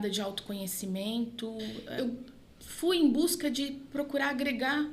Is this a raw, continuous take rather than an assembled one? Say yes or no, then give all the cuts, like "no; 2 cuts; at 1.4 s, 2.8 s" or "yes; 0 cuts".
no; 1 cut; at 1.8 s